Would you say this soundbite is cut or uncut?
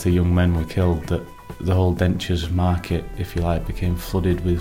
uncut